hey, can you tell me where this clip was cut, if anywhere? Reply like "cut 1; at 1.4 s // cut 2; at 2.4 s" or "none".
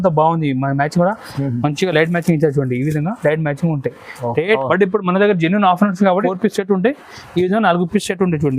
cut 1; at 4.6 s // cut 2; at 6.3 s